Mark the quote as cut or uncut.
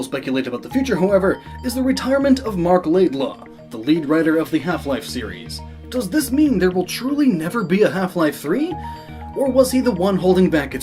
uncut